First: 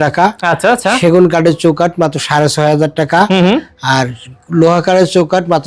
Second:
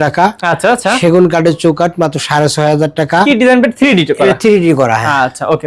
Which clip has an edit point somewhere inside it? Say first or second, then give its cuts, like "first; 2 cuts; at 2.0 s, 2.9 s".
second; 1 cut; at 3.3 s